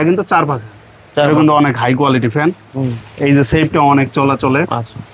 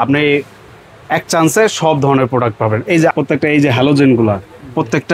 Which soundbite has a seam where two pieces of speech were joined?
second; 1 cut; at 3.1 s

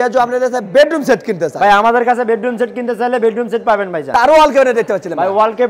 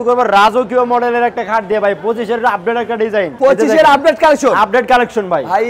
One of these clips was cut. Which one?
first; 1 cut; at 4.1 s

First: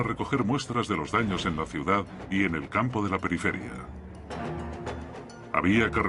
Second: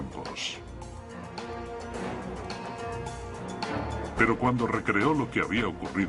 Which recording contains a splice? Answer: first; 1 cut; at 4.8 s

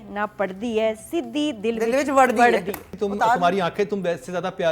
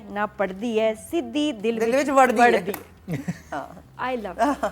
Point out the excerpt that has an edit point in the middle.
first; 1 cut; at 2.9 s

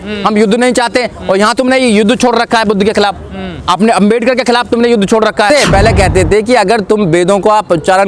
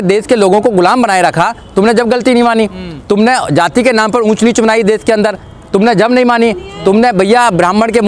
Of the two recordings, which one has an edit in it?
first; 1 cut; at 5.5 s

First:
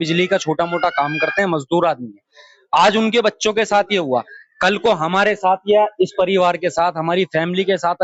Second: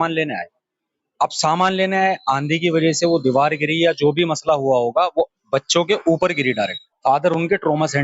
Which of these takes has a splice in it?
second; 1 cut; at 6.8 s

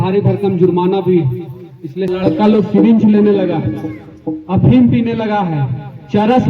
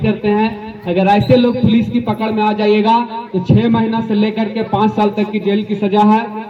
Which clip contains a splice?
first; 1 cut; at 2.1 s

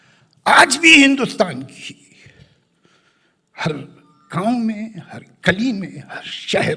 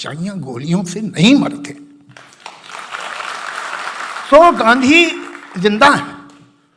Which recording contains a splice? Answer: second; 1 cut; at 4.2 s

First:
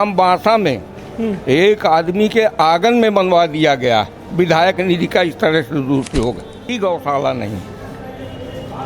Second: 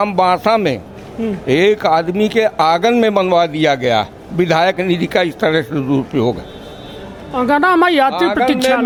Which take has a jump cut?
first; 1 cut; at 6.7 s

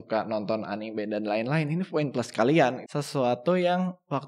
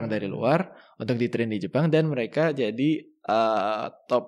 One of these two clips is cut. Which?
first; 1 cut; at 2.9 s

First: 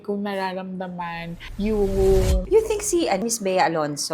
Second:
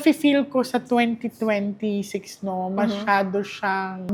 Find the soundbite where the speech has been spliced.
first; 2 cuts; at 2.4 s, 3.2 s

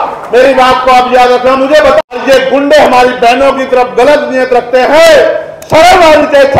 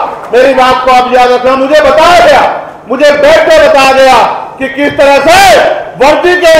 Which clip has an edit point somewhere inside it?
first; 1 cut; at 2.0 s

